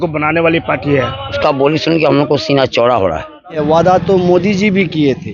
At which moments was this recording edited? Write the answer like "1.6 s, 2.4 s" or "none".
1.4 s, 3.6 s